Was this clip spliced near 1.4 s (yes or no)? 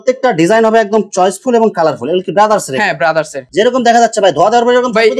no